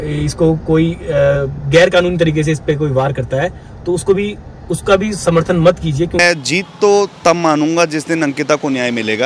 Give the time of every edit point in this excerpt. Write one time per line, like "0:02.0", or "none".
0:06.2